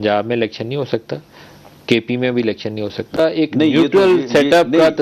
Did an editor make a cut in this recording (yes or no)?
yes